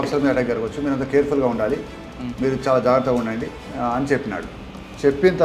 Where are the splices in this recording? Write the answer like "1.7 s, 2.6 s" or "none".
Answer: 3.6 s